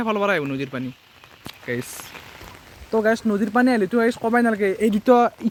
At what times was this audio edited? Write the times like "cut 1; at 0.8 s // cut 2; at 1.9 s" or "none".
none

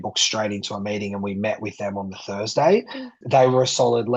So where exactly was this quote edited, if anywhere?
cut 1; at 3.2 s

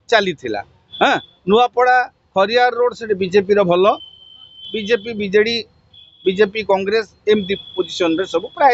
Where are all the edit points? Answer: none

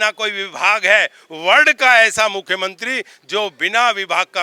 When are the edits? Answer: none

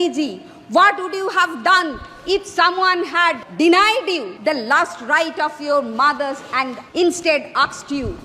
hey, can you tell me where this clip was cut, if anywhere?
cut 1; at 3.4 s // cut 2; at 4.3 s // cut 3; at 6.8 s

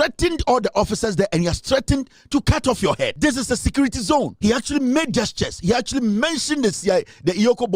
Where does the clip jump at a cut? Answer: cut 1; at 3.1 s // cut 2; at 4.3 s

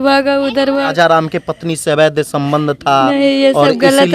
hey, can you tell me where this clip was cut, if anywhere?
cut 1; at 0.9 s

